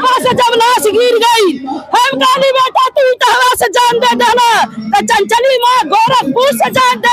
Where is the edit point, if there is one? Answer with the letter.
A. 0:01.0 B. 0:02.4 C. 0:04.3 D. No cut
D